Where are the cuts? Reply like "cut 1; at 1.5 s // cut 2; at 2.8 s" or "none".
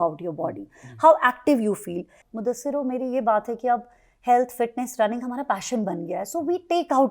cut 1; at 2.2 s

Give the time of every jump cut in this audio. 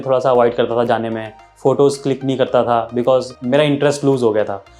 cut 1; at 3.4 s

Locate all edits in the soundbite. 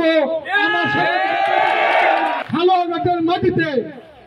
cut 1; at 2.4 s

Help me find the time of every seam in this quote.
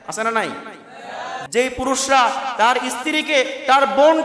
cut 1; at 1.4 s

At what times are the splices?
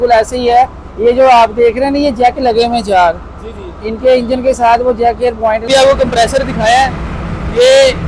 cut 1; at 5.7 s

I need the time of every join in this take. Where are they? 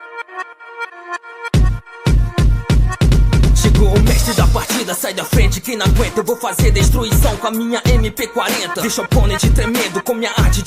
cut 1; at 1.5 s

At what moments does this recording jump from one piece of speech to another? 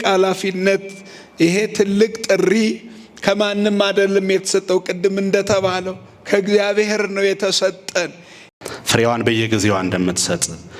cut 1; at 8.4 s

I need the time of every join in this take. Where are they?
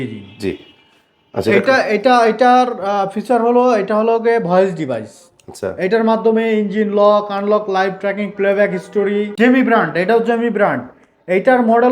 cut 1; at 9.3 s

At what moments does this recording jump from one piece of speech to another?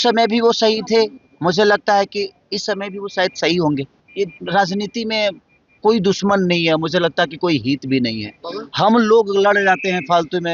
cut 1; at 4.0 s

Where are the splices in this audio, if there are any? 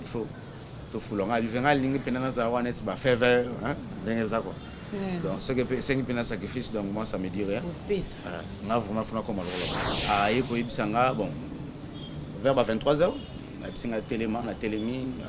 cut 1; at 9.9 s

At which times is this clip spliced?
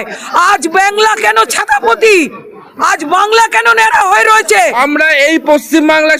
cut 1; at 4.8 s

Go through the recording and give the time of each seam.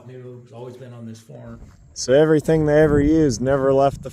cut 1; at 1.6 s

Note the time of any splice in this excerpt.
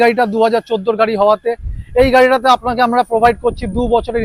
none

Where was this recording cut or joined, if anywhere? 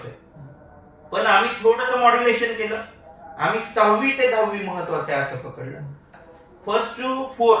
cut 1; at 6.2 s

